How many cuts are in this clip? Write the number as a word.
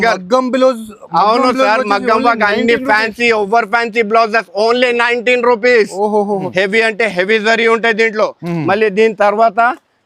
one